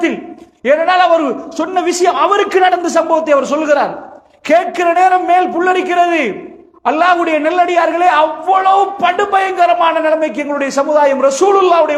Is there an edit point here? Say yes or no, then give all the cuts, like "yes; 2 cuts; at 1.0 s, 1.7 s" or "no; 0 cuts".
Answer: no; 0 cuts